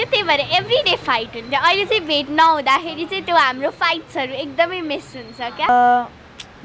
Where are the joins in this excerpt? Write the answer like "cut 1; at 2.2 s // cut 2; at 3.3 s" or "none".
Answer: cut 1; at 5.7 s